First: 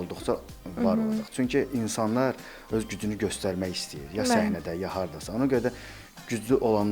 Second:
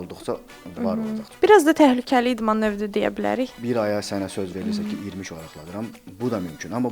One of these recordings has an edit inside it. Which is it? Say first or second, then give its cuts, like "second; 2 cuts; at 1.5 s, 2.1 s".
second; 2 cuts; at 1.3 s, 3.6 s